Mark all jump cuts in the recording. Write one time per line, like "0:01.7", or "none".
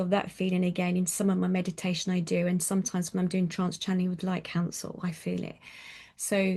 none